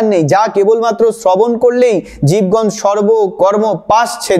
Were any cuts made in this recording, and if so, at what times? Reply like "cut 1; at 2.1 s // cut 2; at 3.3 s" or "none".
none